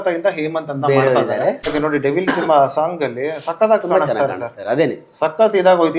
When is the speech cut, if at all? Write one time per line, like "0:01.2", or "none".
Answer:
0:01.7